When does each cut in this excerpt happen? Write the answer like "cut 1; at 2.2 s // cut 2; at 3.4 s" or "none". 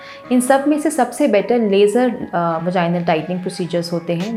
none